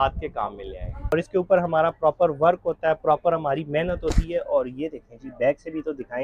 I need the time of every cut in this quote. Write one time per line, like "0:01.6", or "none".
0:01.1